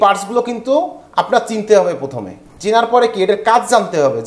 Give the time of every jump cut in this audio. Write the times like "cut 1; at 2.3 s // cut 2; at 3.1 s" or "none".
none